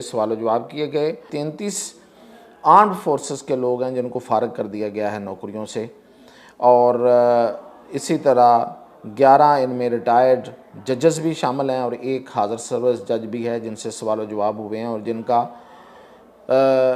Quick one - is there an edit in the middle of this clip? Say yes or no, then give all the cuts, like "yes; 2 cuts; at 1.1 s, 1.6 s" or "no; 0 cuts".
yes; 1 cut; at 1.3 s